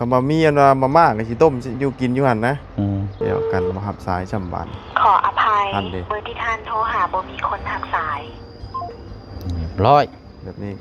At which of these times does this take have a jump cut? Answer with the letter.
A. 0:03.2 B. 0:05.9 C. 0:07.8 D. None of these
A